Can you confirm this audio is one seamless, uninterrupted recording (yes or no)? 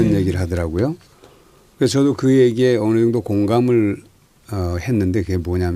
yes